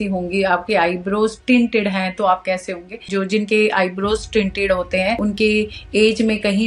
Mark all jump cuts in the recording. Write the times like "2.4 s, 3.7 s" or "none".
3.1 s, 5.2 s